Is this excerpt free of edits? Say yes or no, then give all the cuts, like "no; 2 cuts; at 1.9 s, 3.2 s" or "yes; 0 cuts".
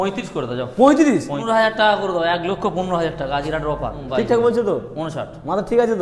no; 2 cuts; at 1.4 s, 4.0 s